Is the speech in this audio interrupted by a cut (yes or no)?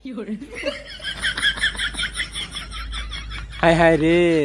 yes